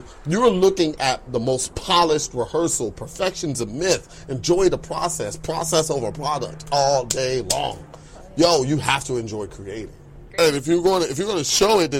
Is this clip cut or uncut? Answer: cut